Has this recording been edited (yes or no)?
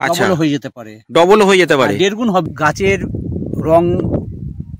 yes